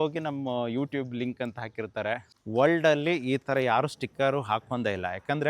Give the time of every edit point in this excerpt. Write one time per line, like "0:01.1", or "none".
0:02.3